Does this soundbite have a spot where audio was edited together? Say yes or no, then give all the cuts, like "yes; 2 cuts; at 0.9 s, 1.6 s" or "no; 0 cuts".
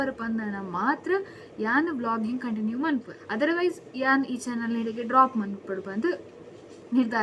no; 0 cuts